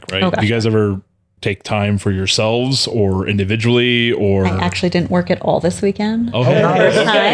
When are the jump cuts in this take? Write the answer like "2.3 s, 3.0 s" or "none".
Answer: none